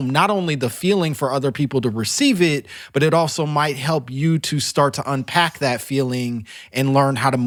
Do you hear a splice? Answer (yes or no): no